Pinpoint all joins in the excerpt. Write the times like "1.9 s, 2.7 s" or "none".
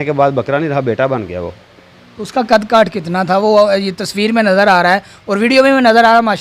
none